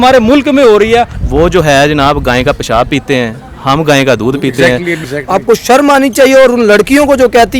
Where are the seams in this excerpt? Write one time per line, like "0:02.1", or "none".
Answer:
0:01.2
0:05.1